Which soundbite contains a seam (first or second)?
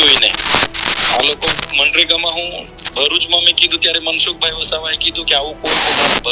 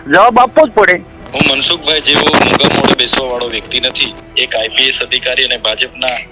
second